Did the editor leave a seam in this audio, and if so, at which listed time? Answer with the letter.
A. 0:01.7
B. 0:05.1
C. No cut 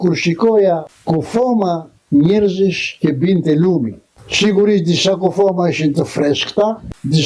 C